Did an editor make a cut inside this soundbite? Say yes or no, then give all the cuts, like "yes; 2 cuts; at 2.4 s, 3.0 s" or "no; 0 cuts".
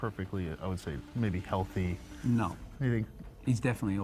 no; 0 cuts